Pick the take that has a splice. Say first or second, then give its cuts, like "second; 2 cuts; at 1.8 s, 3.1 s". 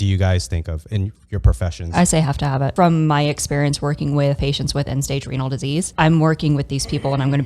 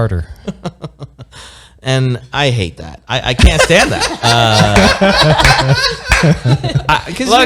first; 3 cuts; at 2.7 s, 4.4 s, 5.9 s